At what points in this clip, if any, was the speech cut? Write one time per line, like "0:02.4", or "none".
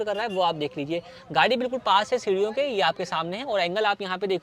none